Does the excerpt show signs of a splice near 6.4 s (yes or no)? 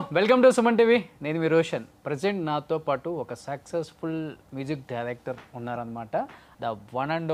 yes